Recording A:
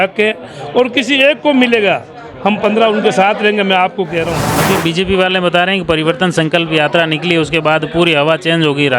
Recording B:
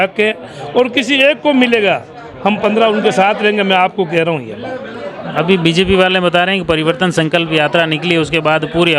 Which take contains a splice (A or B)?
A